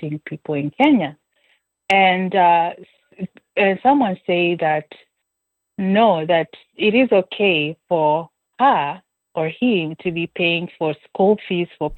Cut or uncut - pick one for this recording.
uncut